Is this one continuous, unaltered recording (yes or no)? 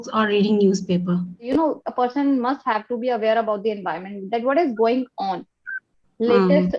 no